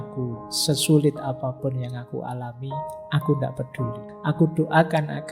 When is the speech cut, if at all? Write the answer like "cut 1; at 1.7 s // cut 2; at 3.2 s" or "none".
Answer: cut 1; at 4.1 s